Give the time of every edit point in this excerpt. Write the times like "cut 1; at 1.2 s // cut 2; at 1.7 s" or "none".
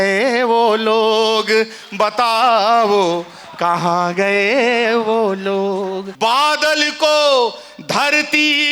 cut 1; at 6.1 s